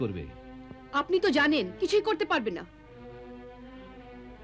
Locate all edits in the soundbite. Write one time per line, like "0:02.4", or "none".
0:01.8

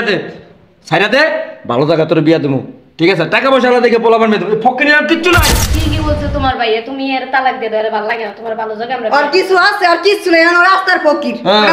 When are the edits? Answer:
0:05.6

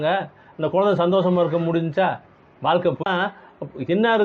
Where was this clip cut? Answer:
0:03.0

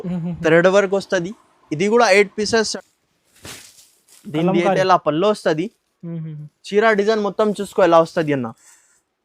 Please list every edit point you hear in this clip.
0:02.7

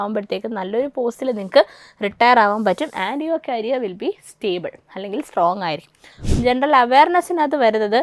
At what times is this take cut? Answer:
0:06.2

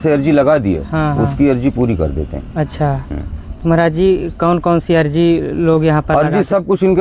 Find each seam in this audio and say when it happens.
none

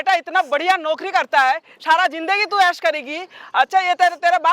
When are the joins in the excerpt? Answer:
none

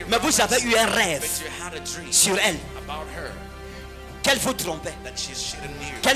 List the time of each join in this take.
none

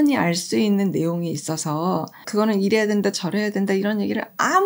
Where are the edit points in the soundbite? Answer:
0:02.2

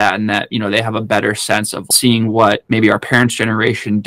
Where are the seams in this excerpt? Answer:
0:01.9
0:02.6

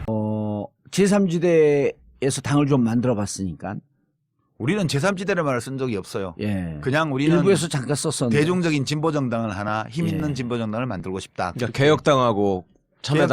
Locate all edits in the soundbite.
0:11.8

